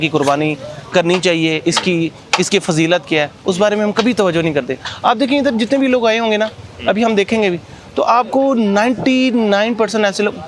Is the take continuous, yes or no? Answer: yes